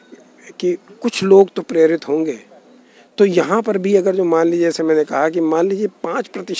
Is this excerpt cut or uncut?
uncut